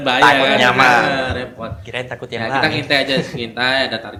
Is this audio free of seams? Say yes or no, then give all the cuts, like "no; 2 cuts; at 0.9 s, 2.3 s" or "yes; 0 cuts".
yes; 0 cuts